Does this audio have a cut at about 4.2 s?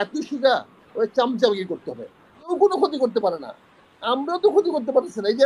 no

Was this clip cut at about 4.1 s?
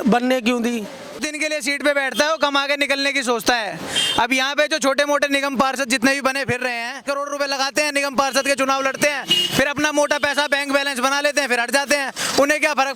no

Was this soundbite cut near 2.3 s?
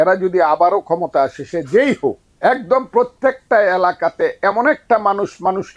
yes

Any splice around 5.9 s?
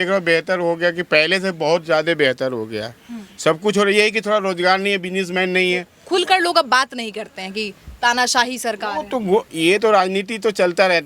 yes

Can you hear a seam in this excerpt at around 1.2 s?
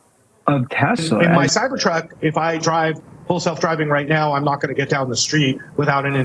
yes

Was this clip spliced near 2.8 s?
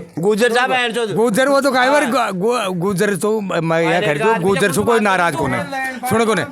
no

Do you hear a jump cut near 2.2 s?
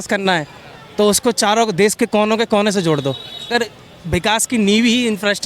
no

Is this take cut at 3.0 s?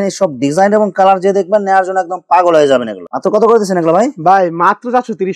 no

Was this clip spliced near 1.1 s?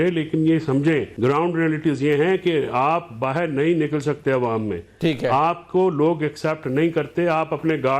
yes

